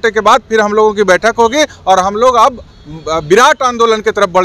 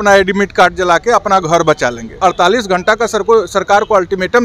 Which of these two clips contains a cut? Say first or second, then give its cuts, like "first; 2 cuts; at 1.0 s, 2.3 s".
second; 1 cut; at 2.2 s